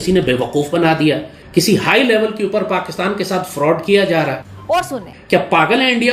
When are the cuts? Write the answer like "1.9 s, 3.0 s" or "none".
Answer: 1.3 s, 4.8 s